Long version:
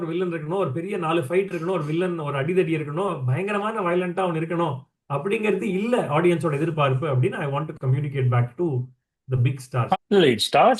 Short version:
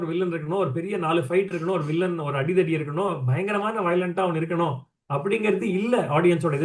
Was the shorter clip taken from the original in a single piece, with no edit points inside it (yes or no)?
yes